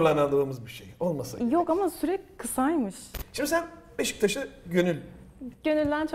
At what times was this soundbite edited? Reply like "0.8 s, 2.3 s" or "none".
3.1 s